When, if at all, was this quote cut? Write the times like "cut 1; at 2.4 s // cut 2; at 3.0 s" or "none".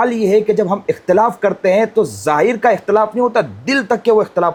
none